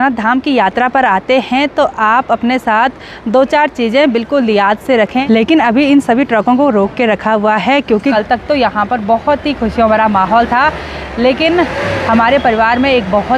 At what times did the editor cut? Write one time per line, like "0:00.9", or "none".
0:05.2
0:08.1